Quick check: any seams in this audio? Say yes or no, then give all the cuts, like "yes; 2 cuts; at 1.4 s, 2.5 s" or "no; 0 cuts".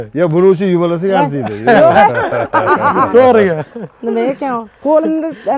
no; 0 cuts